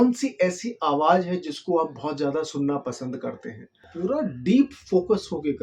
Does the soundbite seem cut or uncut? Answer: cut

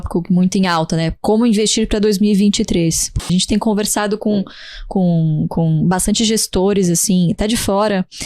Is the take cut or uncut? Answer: cut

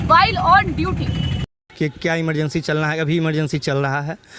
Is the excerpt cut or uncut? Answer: cut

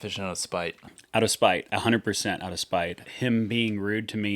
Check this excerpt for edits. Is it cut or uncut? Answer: cut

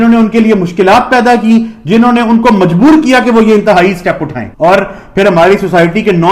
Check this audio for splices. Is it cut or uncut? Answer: uncut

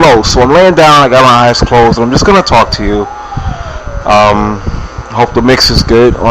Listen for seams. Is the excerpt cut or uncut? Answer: cut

